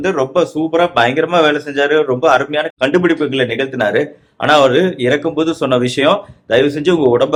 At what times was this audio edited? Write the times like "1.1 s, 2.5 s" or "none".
none